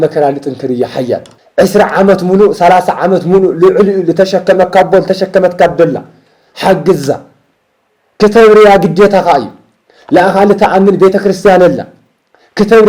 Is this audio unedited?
no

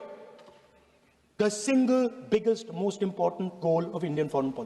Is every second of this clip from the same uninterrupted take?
yes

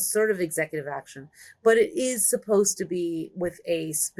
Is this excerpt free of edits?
yes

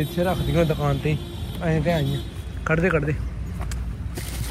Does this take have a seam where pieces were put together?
no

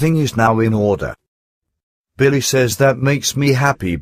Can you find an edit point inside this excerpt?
no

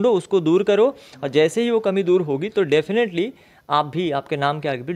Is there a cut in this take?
no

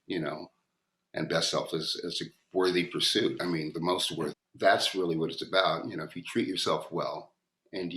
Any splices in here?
yes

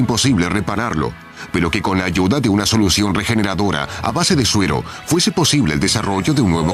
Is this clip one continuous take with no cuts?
no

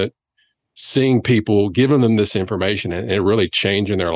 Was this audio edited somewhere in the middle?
no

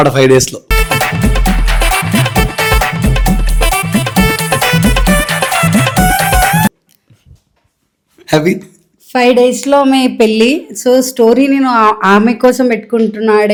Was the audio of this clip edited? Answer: no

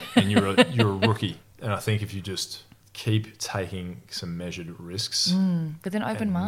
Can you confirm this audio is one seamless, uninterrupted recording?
no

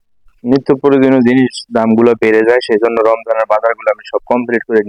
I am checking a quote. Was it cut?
no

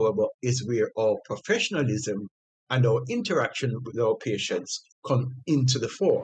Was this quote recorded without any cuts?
yes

